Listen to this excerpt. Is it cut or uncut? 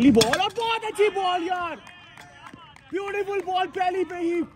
uncut